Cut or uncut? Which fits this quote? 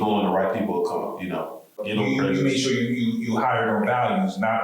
cut